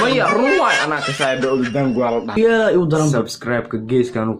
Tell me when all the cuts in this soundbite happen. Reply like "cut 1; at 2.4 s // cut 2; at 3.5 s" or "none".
cut 1; at 2.3 s